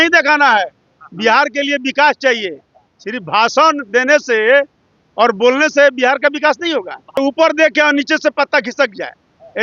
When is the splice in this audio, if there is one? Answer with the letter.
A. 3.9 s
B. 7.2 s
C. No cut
B